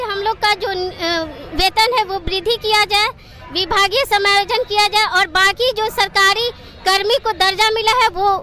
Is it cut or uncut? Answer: uncut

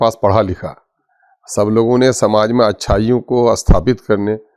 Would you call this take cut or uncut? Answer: uncut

